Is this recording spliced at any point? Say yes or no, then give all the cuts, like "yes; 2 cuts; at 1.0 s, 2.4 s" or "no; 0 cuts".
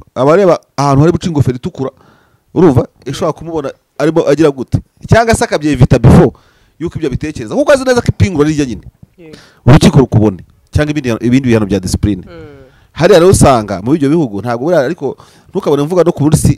no; 0 cuts